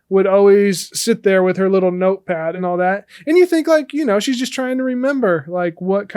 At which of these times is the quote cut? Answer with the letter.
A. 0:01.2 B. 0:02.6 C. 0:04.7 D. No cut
B